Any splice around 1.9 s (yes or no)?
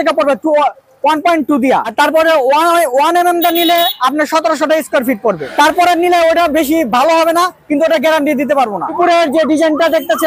yes